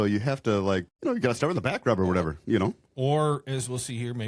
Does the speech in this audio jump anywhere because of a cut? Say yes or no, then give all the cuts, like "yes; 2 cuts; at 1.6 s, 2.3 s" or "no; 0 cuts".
yes; 1 cut; at 0.9 s